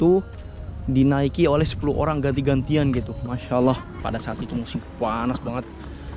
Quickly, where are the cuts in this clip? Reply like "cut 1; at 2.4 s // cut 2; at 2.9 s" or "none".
cut 1; at 3.9 s